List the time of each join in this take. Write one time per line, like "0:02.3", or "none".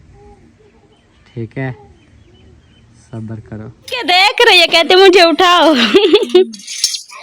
0:04.0